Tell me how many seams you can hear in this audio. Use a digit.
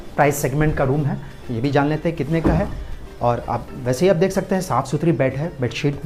0